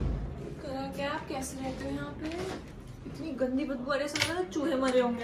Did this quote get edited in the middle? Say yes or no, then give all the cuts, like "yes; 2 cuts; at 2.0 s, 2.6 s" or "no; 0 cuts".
no; 0 cuts